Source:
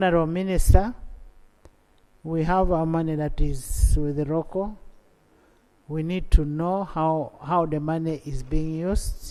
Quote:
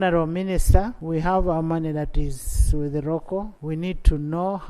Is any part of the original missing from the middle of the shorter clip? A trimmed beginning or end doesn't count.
yes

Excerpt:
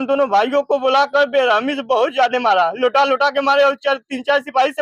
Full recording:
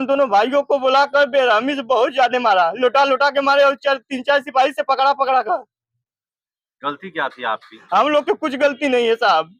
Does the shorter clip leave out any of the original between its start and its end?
no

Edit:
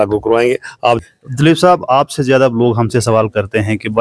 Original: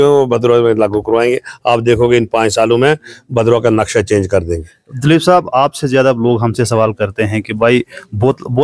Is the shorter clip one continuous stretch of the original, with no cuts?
no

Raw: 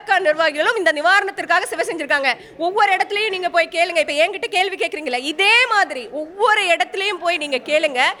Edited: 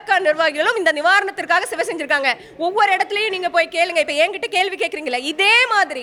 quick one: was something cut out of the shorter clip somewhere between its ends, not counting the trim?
no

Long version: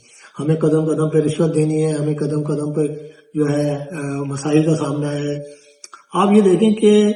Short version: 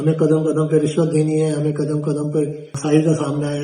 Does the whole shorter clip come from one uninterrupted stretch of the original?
no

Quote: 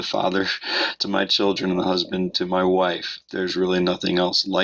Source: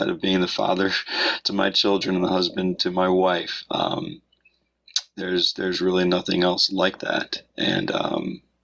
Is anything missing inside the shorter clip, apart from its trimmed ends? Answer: yes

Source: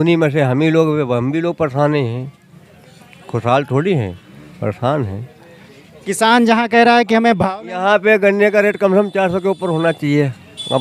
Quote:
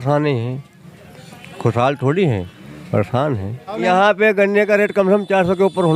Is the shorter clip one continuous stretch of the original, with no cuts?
no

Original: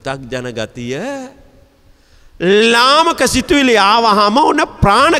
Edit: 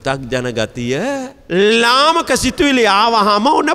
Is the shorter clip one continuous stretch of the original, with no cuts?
no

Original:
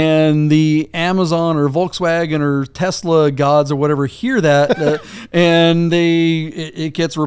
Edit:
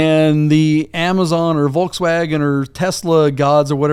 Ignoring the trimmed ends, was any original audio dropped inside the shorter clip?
no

